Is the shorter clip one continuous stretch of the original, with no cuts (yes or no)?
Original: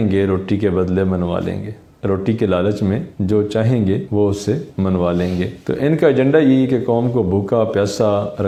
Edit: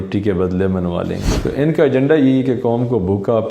no